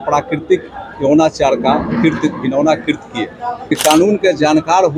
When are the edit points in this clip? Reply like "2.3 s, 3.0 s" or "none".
3.6 s